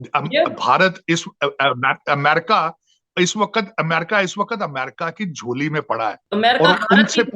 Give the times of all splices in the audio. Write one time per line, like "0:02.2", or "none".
0:06.2